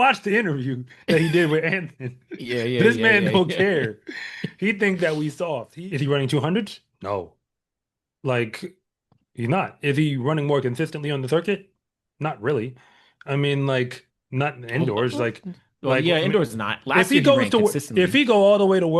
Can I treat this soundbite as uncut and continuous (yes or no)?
no